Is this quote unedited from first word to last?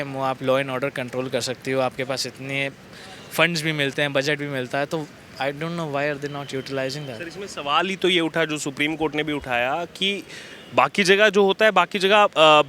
yes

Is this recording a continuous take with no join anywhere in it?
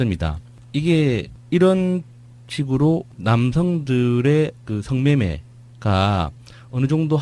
no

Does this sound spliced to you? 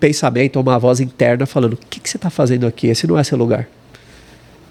no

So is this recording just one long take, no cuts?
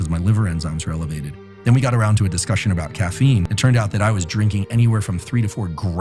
no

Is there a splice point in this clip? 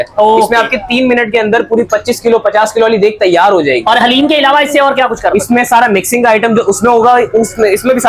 no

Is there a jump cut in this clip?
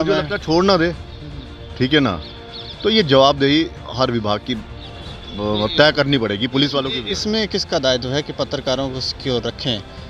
no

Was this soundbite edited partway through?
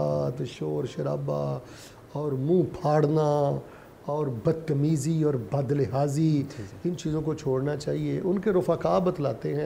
no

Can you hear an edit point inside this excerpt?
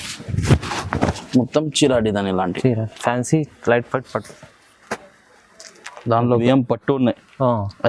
yes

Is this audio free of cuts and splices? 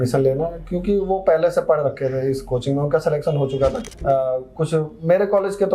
no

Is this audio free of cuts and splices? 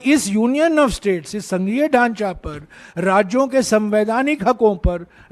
yes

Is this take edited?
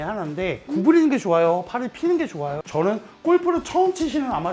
yes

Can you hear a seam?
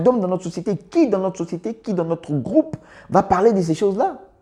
no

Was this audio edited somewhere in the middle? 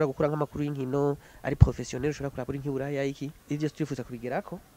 yes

